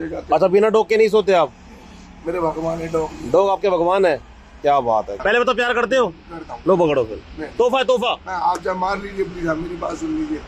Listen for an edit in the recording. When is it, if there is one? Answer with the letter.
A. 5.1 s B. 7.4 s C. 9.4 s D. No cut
A